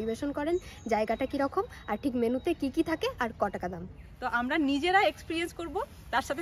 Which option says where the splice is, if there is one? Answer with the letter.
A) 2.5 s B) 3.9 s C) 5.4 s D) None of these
B